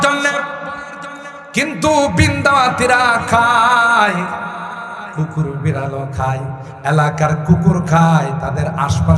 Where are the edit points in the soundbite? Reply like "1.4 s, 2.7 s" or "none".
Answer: none